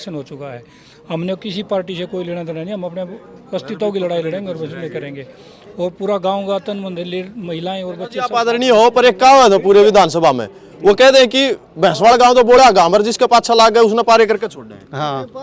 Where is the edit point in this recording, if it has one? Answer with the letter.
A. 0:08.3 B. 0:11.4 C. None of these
A